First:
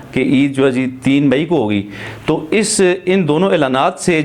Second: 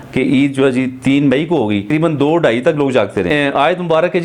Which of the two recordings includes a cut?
second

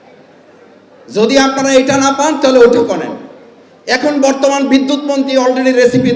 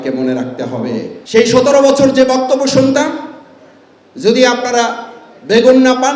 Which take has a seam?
second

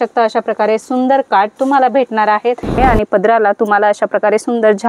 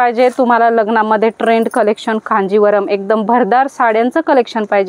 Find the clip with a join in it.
first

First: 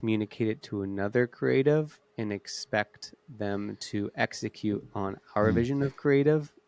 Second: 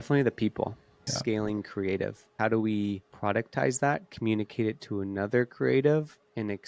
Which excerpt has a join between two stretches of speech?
second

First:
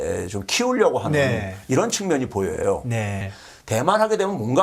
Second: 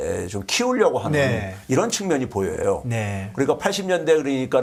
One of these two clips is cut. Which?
first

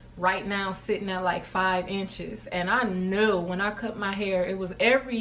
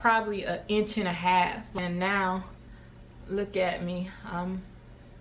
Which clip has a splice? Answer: second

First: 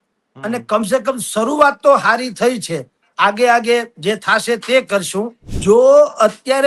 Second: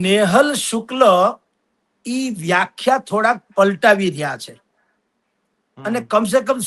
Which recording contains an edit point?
first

